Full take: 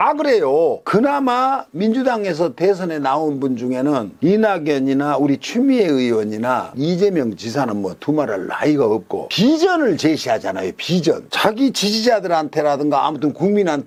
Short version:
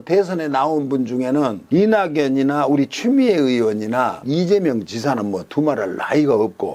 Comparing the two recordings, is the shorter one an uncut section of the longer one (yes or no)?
yes